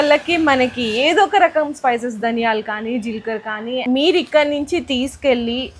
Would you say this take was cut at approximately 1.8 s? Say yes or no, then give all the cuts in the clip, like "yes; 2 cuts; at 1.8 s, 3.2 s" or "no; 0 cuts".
no; 1 cut; at 3.8 s